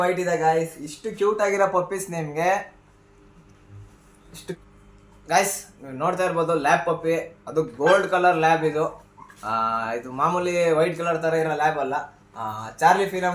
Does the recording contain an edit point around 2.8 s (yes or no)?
no